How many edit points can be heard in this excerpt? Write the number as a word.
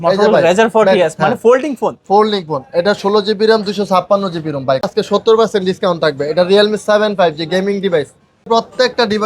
two